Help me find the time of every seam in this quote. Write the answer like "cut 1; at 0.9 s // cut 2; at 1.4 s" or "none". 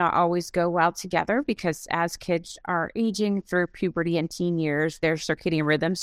none